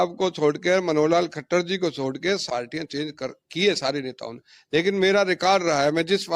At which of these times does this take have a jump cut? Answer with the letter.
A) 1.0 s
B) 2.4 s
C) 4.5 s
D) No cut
B